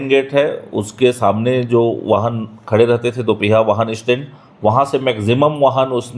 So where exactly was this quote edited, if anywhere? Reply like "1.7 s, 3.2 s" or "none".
none